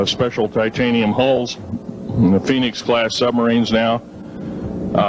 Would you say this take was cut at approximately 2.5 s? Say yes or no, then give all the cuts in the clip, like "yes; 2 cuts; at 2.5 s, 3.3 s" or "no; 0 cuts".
yes; 1 cut; at 2.5 s